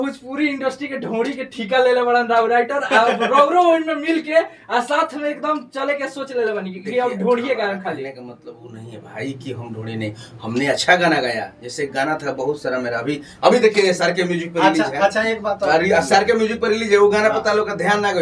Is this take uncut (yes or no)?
yes